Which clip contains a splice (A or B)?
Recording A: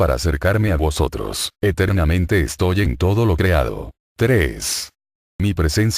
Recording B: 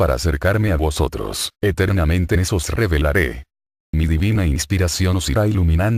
A